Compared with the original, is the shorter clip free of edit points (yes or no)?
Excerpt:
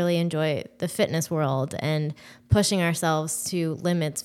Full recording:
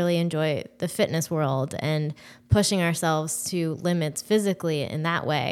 yes